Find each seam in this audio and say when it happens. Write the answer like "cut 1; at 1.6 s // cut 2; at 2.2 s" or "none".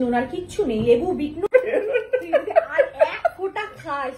cut 1; at 1.5 s